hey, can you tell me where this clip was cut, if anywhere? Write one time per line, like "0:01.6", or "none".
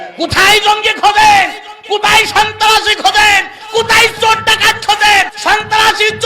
0:05.3